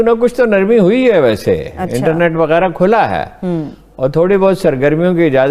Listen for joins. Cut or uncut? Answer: uncut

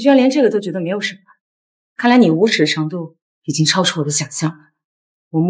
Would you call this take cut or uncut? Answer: uncut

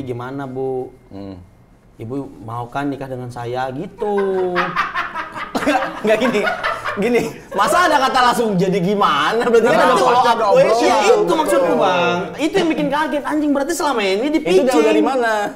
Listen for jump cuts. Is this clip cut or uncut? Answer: uncut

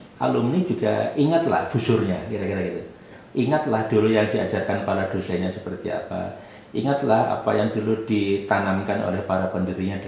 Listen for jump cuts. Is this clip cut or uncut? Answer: uncut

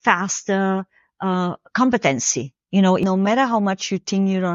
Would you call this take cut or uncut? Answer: cut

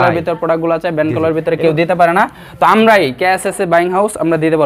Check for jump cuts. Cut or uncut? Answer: uncut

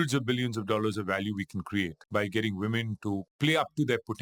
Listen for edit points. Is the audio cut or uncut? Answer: cut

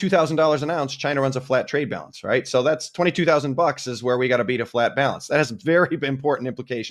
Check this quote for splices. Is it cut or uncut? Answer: uncut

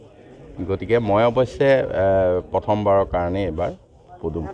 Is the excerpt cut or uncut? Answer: uncut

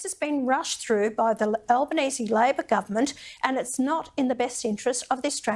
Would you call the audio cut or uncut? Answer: cut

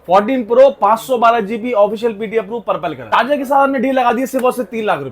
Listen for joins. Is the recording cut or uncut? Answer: cut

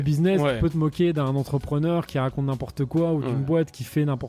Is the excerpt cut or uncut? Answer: uncut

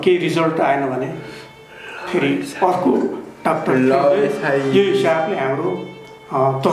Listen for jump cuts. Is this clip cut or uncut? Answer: uncut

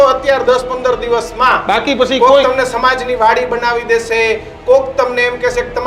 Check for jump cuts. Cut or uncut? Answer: uncut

